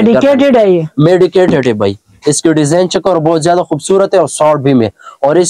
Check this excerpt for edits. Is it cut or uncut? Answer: uncut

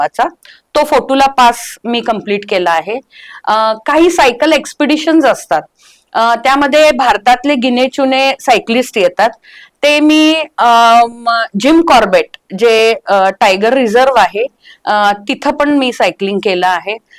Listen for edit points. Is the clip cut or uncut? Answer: uncut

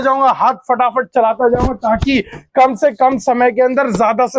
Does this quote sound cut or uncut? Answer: uncut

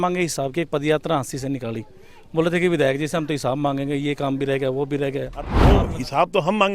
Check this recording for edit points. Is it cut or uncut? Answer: cut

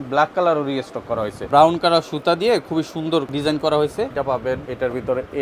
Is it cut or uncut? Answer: cut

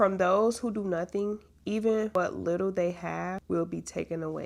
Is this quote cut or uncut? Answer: cut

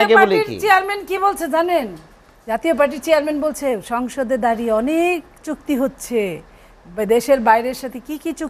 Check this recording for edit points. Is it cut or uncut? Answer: uncut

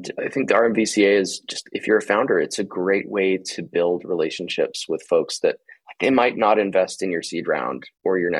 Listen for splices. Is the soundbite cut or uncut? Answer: uncut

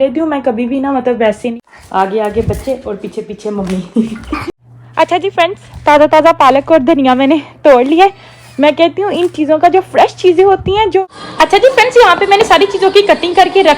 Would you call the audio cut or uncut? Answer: cut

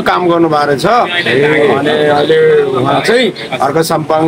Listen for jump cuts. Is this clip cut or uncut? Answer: uncut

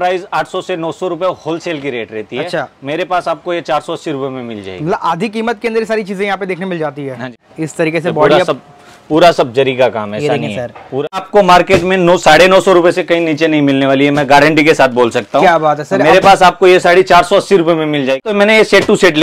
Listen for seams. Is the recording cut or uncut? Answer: cut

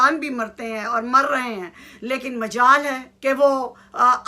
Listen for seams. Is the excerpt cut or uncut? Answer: cut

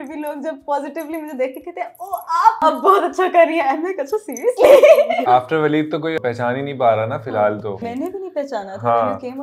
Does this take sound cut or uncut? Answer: cut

